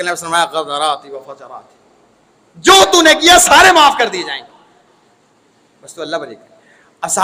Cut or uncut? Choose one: uncut